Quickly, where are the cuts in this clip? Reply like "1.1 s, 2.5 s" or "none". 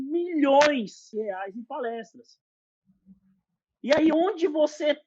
1.0 s